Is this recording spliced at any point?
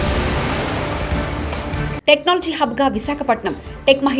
yes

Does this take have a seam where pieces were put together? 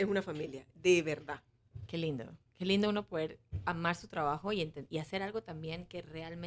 no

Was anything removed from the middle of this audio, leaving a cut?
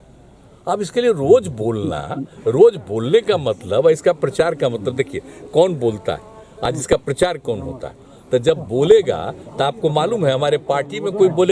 no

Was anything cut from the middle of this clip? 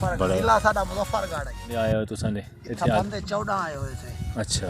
yes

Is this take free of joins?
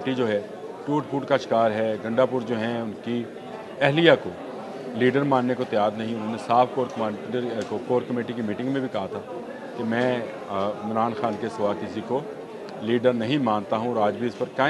yes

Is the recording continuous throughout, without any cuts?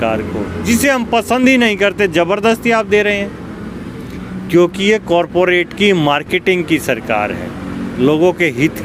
yes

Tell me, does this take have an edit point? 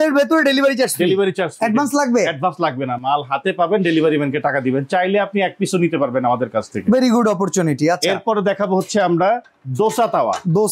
no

